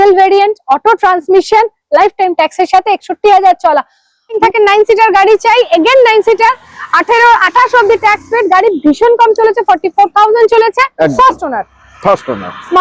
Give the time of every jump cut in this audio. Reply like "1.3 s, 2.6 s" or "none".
4.4 s, 11.1 s